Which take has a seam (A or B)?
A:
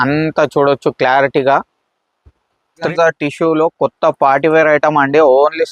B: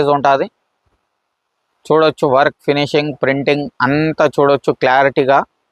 A